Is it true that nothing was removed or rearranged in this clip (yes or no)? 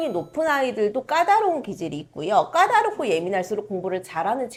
yes